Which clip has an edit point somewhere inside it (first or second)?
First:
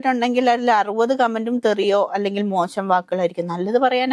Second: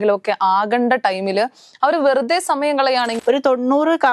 second